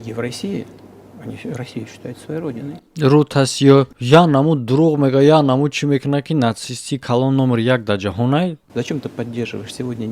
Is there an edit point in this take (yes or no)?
yes